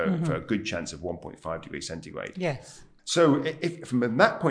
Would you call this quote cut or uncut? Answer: cut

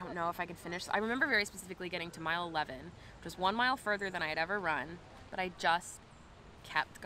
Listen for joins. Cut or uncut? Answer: cut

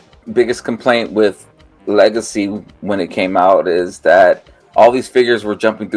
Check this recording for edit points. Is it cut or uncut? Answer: uncut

